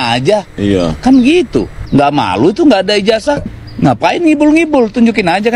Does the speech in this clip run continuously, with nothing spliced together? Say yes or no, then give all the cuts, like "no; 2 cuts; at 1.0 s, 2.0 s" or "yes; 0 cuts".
no; 1 cut; at 3.6 s